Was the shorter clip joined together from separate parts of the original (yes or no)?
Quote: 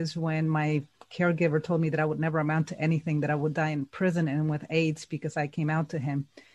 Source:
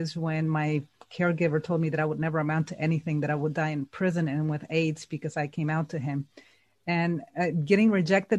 no